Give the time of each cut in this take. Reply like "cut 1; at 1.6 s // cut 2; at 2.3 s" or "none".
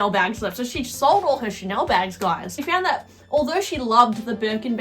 cut 1; at 2.6 s